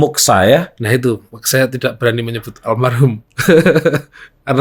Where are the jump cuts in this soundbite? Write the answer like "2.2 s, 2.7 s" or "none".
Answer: none

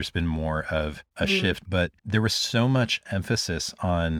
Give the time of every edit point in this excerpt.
1.6 s

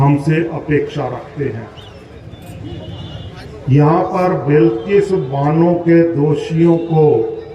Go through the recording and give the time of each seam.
2.2 s

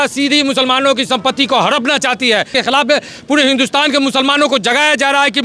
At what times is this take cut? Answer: 2.5 s

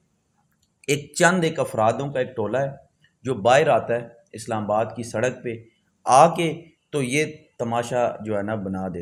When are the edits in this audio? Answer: none

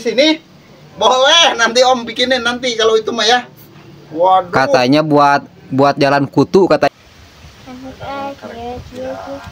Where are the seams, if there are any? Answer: 6.9 s

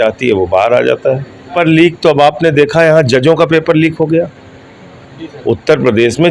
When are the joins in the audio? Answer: 1.5 s

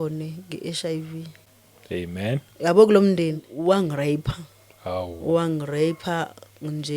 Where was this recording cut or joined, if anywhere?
3.5 s

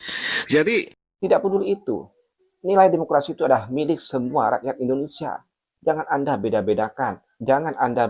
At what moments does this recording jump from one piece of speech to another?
1.0 s

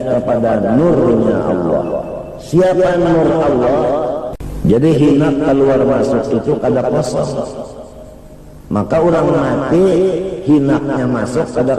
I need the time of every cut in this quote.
4.3 s

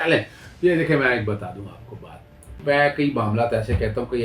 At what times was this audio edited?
2.6 s

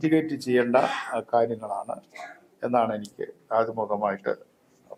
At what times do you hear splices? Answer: none

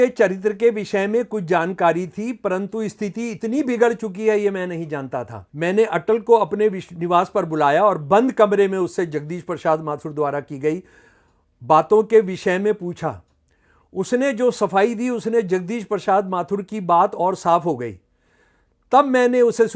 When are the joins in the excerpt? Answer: 5.4 s

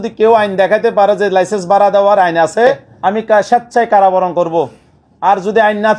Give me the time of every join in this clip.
2.9 s

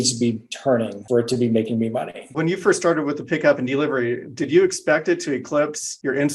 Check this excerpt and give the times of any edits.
2.2 s

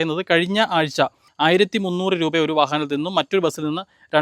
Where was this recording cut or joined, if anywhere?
1.2 s

